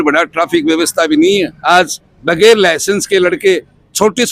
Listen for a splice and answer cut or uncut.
cut